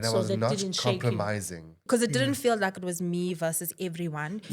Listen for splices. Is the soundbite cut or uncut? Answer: cut